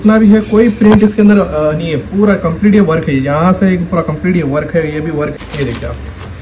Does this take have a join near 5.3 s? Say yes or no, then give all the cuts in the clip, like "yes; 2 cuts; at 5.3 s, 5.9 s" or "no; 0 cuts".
yes; 1 cut; at 5.3 s